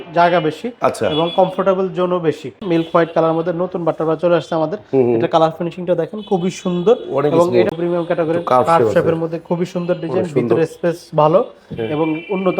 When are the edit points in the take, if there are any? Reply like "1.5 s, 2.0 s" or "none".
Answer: 2.6 s, 7.7 s